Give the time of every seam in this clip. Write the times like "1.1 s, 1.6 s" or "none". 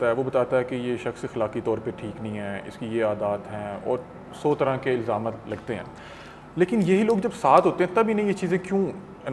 none